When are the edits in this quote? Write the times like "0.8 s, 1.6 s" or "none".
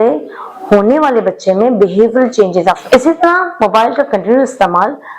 2.8 s